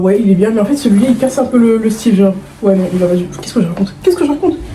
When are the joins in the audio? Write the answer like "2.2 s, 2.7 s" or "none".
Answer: none

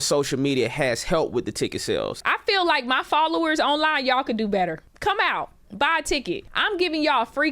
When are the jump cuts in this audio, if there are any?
2.2 s, 4.9 s, 6.5 s

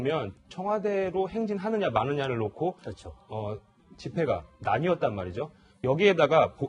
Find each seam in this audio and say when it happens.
4.5 s

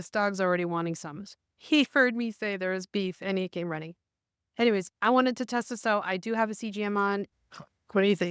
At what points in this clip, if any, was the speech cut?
7.3 s

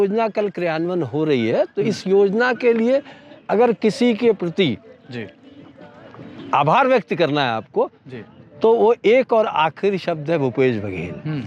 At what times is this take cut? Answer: none

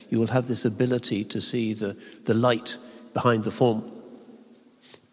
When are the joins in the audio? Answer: none

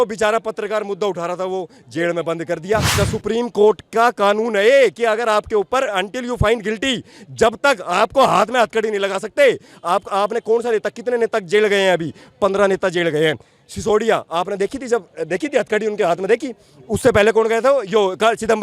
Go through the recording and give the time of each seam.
2.9 s

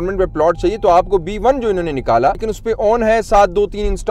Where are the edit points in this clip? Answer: 2.5 s

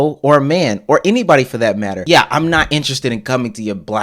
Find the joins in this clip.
2.0 s

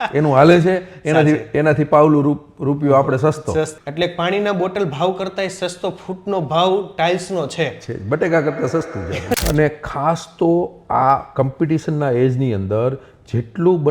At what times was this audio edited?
3.8 s, 9.4 s

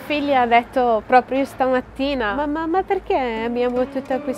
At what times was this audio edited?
none

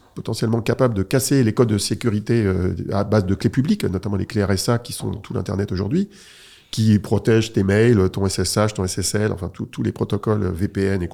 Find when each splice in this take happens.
none

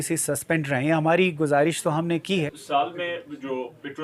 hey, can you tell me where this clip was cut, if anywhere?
2.5 s

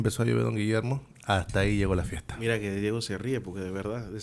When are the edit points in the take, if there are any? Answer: none

